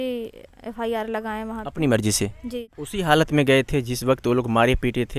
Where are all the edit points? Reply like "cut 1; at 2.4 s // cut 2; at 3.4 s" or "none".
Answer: cut 1; at 2.8 s